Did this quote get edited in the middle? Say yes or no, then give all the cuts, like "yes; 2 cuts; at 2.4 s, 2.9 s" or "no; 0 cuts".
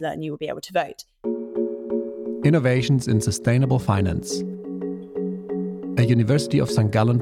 yes; 1 cut; at 1.0 s